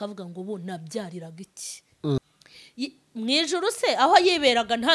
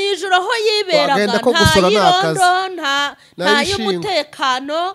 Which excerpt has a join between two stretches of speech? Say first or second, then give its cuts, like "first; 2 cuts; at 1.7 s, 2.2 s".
first; 1 cut; at 2.2 s